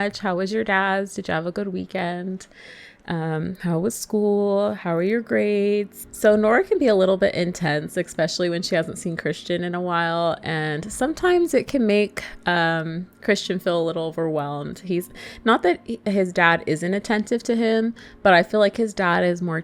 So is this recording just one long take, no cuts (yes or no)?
yes